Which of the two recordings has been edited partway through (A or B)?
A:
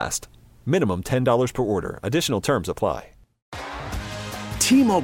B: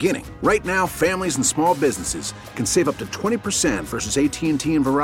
A